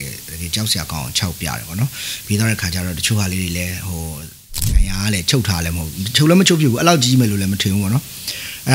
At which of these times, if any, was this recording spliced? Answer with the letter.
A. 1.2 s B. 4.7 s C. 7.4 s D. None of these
B